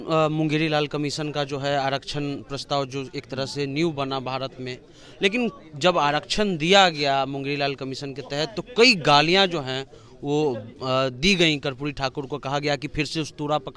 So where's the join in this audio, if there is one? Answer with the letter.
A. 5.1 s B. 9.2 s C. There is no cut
C